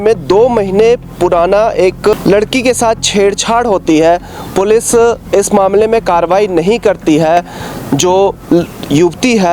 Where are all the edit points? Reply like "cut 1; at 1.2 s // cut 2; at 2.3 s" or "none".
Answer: cut 1; at 2.1 s